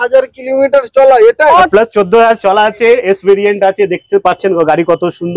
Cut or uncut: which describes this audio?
cut